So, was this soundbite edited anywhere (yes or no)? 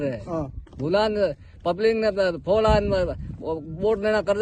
no